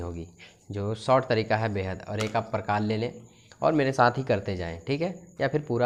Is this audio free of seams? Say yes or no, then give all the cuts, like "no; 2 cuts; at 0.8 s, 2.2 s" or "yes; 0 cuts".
yes; 0 cuts